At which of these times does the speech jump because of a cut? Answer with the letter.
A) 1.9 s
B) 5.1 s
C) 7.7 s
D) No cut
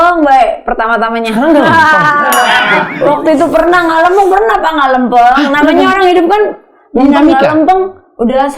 D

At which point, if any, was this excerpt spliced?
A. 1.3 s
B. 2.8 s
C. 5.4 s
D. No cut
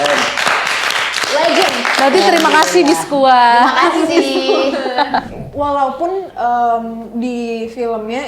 C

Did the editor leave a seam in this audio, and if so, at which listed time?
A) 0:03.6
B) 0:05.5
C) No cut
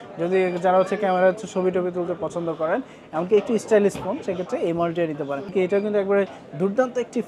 B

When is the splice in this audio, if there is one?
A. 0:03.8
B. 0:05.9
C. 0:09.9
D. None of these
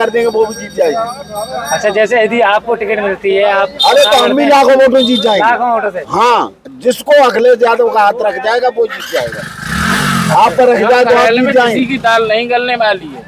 D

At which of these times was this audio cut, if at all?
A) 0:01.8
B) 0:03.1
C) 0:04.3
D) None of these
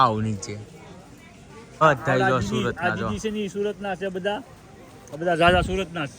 A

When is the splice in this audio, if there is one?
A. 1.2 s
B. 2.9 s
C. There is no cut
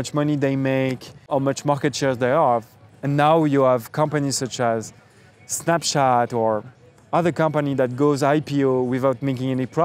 A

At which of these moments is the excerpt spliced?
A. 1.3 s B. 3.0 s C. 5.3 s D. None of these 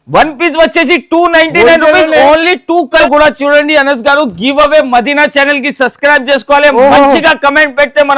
B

